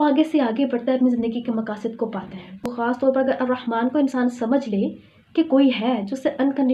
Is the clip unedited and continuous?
no; 1 cut; at 2.9 s

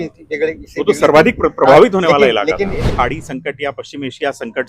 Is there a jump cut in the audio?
yes; 1 cut; at 2.9 s

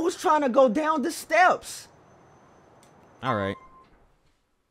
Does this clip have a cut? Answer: no; 0 cuts

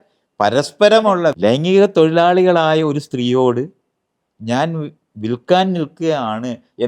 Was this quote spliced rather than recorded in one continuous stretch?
yes; 1 cut; at 1.4 s

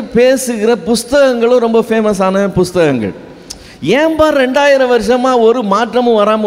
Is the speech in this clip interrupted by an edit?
no; 0 cuts

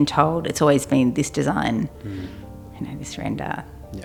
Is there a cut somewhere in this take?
no; 0 cuts

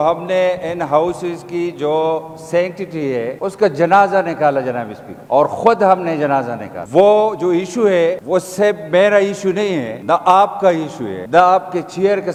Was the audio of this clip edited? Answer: no; 0 cuts

